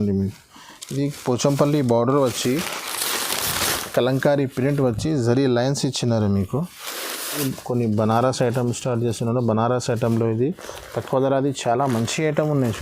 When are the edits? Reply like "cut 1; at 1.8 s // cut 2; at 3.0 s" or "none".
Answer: cut 1; at 7.4 s